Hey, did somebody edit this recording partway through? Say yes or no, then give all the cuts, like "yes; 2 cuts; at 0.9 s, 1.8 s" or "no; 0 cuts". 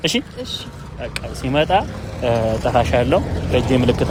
no; 0 cuts